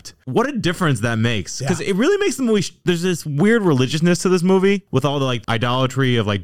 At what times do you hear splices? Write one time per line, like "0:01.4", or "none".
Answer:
0:05.4

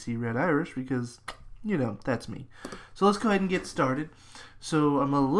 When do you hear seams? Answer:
0:02.0

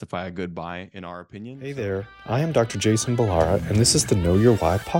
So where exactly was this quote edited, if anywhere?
0:01.6

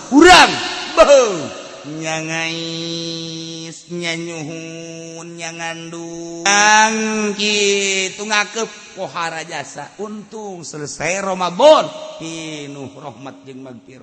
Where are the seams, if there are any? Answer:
0:06.5

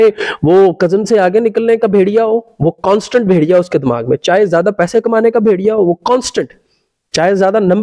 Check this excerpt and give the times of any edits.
none

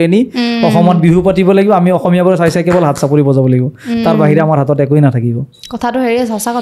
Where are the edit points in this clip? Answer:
none

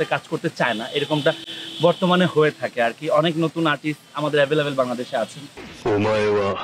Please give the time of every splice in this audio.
none

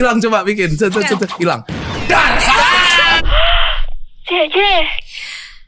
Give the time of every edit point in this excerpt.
0:03.2

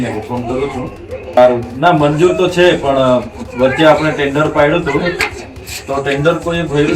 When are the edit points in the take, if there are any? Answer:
0:01.4

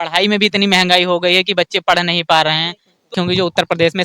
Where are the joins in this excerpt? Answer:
0:03.1

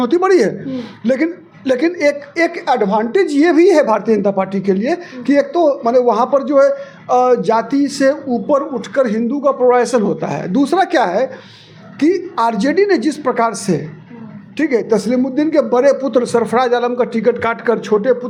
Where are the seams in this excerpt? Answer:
none

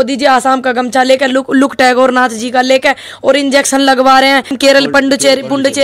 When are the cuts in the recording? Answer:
0:04.5

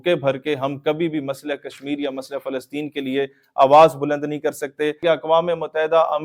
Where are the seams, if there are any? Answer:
0:05.0

